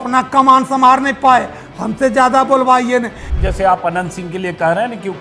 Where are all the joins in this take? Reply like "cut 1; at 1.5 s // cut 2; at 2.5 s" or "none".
cut 1; at 3.3 s